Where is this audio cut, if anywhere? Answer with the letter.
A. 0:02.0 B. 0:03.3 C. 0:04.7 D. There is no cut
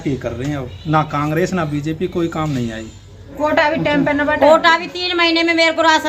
B